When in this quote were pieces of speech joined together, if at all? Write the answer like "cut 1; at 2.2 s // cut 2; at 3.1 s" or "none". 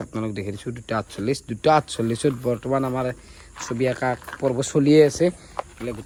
none